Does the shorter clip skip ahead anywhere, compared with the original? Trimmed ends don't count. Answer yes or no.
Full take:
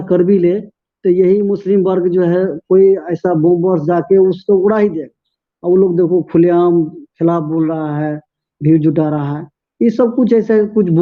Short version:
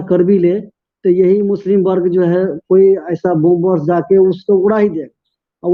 no